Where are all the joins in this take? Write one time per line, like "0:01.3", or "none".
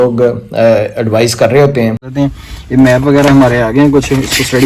0:02.1